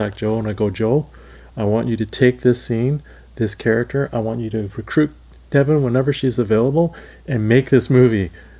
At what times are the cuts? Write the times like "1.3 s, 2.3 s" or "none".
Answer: none